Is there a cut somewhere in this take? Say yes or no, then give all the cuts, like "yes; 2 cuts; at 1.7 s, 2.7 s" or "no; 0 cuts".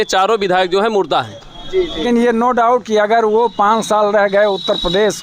yes; 1 cut; at 2.0 s